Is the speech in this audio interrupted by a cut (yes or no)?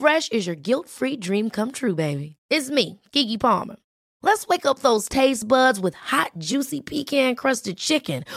no